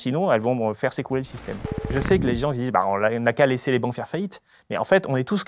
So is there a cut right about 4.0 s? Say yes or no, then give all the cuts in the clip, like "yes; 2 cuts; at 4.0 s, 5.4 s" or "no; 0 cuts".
no; 1 cut; at 1.9 s